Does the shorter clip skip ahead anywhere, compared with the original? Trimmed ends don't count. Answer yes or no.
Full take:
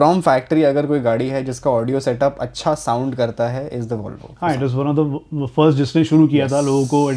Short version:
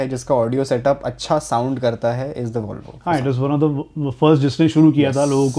no